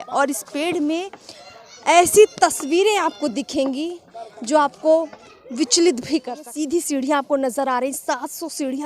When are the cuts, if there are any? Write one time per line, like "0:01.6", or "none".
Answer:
0:06.4